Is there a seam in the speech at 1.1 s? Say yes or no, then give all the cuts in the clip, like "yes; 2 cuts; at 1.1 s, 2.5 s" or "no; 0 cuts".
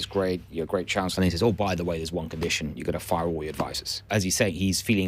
yes; 2 cuts; at 1.1 s, 4.1 s